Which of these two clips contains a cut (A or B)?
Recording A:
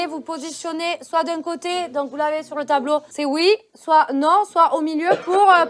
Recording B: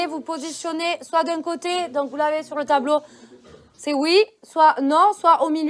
A